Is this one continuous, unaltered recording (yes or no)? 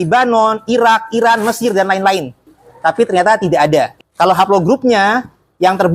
no